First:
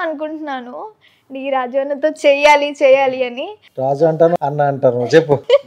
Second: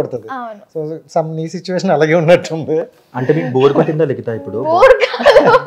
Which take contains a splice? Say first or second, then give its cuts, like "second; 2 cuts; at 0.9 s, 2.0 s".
first; 1 cut; at 4.3 s